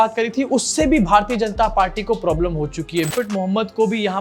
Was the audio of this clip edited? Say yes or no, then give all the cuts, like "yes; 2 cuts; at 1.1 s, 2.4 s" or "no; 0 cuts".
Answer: yes; 1 cut; at 3.1 s